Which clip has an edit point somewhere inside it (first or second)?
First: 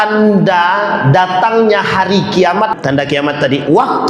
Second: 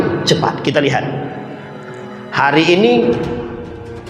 first